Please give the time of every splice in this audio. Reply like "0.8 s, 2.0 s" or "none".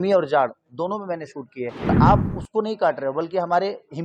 1.9 s